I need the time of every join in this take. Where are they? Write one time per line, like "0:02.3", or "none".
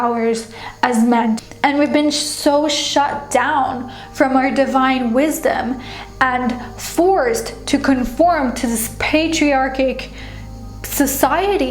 0:01.3